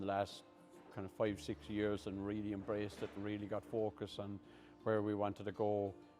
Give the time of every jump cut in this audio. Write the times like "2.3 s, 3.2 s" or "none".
none